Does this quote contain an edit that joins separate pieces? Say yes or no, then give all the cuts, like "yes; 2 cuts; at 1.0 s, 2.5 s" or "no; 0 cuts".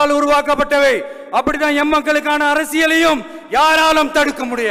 no; 0 cuts